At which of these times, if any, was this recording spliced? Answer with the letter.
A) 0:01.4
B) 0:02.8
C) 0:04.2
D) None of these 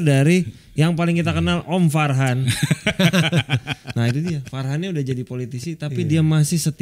D